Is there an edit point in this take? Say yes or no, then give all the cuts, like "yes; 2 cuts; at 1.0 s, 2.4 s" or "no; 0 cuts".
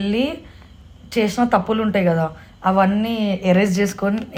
no; 0 cuts